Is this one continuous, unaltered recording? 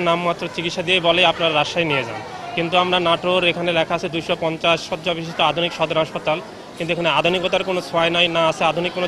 yes; 0 cuts

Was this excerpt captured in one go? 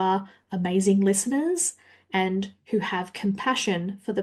yes; 0 cuts

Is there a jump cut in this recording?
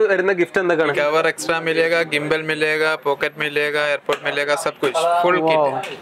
yes; 1 cut; at 1.0 s

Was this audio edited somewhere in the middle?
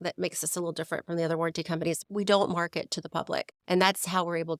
yes; 2 cuts; at 2.0 s, 3.5 s

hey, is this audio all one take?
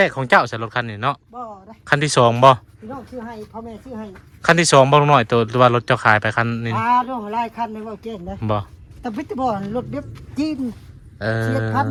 yes; 0 cuts

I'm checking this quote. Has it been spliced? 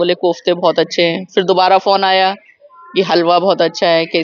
no; 0 cuts

